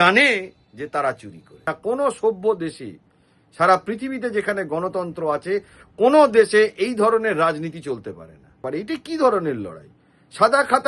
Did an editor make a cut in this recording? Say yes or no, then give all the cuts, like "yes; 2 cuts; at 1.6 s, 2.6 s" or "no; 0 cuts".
yes; 2 cuts; at 1.6 s, 8.6 s